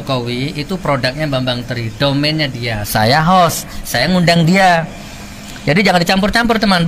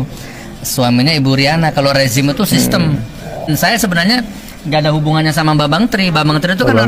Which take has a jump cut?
second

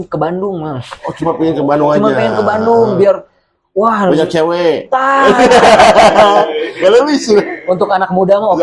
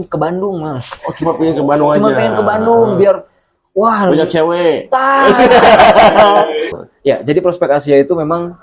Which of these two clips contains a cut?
second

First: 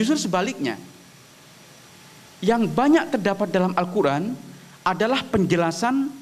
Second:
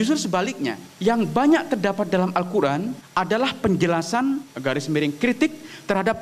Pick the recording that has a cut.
second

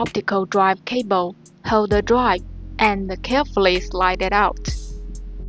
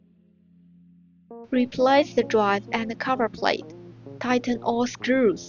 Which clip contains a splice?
second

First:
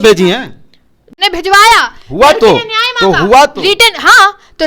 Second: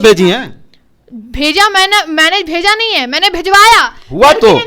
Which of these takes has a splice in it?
first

